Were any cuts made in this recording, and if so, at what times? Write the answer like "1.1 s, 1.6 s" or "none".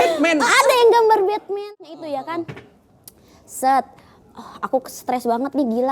1.5 s